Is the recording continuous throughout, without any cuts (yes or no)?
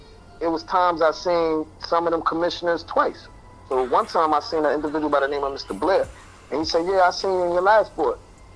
yes